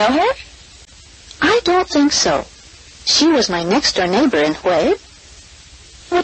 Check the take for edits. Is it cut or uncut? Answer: cut